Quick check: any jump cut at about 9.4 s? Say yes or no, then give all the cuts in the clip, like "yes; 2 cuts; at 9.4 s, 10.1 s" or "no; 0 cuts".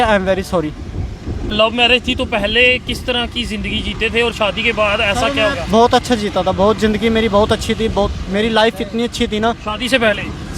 no; 1 cut; at 1.5 s